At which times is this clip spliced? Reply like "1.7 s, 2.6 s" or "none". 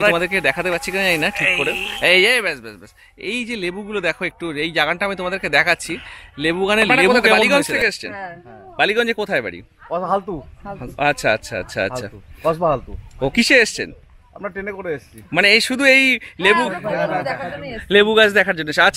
7.5 s